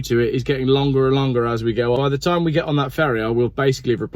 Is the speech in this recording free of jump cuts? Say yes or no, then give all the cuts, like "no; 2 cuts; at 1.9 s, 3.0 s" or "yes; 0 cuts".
no; 1 cut; at 2.0 s